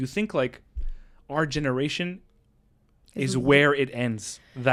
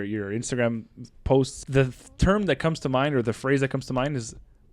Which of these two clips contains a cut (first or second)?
second